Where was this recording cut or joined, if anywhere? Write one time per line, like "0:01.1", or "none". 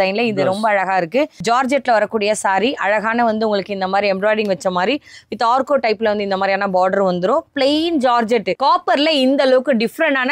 0:01.4
0:08.5